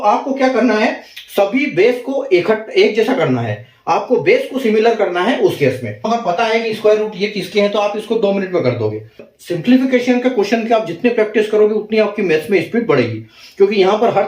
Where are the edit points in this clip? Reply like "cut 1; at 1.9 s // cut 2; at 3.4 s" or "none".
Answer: cut 1; at 6.1 s // cut 2; at 9.3 s